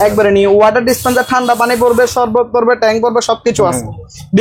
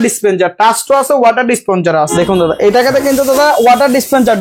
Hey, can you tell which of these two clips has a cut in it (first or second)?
second